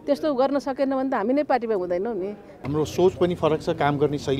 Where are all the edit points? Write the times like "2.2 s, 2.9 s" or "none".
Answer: 2.5 s